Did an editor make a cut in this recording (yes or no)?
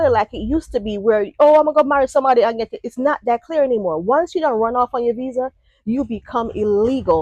no